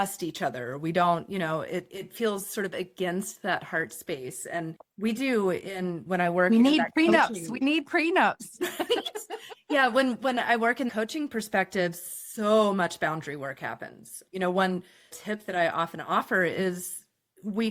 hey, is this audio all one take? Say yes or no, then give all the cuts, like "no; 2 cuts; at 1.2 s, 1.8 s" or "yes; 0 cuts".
yes; 0 cuts